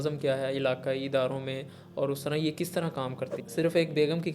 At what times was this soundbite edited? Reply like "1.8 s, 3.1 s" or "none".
3.4 s